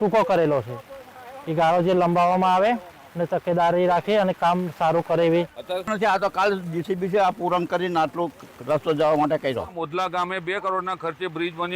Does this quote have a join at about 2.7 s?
no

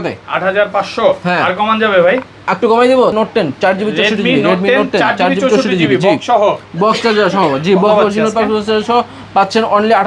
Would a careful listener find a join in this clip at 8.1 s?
no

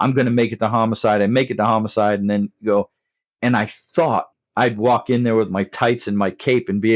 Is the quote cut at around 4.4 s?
yes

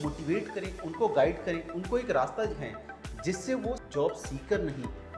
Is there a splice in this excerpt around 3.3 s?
yes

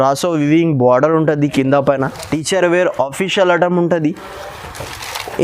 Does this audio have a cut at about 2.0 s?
yes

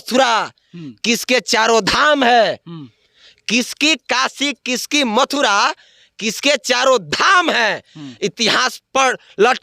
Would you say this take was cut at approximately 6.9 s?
no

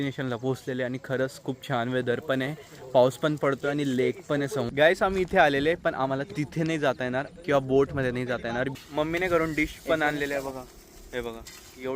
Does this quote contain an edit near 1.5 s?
no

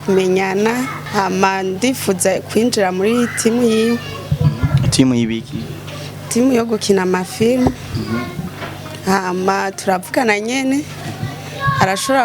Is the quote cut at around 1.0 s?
yes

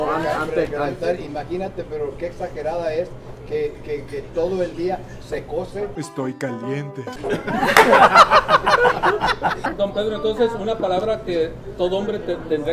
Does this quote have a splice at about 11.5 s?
no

